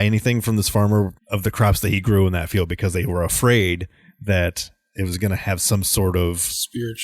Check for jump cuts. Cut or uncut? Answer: cut